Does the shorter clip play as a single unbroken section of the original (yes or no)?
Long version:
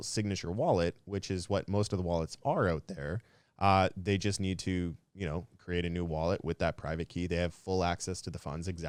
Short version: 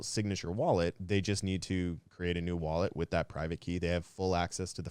no